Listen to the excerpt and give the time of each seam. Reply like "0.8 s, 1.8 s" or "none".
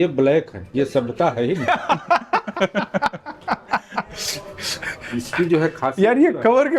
none